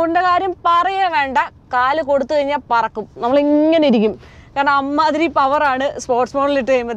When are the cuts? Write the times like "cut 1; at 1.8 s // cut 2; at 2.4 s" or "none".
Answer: none